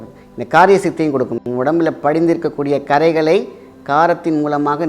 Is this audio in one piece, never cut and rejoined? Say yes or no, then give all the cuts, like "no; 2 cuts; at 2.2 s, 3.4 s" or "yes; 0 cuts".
no; 1 cut; at 1.4 s